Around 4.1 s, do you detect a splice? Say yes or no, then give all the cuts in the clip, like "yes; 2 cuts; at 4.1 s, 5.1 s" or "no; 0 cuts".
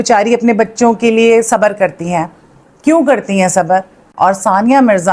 yes; 1 cut; at 4.1 s